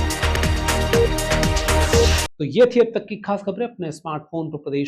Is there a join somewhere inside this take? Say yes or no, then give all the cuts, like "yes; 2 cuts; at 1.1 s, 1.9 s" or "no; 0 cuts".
no; 0 cuts